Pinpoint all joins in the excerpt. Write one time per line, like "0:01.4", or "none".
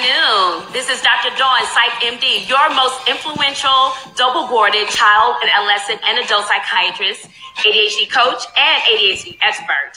none